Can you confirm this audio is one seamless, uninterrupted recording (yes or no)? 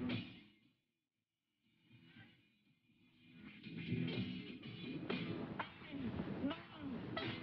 no